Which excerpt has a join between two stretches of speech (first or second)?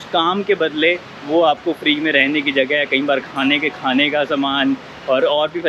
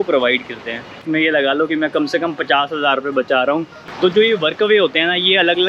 second